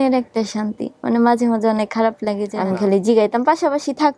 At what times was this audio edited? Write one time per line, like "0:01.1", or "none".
0:02.5